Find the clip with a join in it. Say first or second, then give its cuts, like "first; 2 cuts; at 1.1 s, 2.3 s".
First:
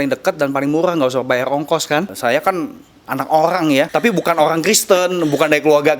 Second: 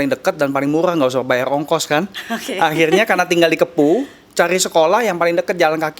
first; 2 cuts; at 2.1 s, 3.9 s